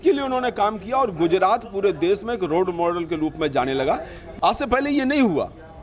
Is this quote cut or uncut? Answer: cut